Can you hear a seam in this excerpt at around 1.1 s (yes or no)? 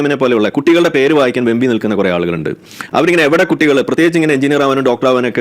no